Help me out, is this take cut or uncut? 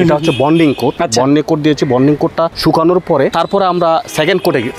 cut